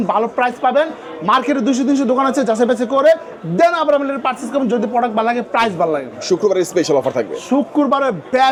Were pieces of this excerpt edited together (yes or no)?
no